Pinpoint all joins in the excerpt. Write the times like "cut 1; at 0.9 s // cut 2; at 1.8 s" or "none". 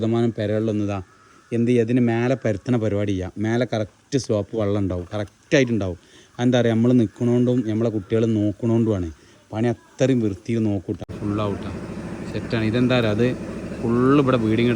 cut 1; at 11.1 s